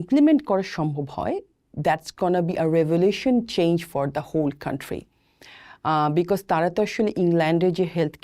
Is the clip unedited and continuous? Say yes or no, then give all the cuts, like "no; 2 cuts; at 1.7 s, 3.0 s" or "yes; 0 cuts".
yes; 0 cuts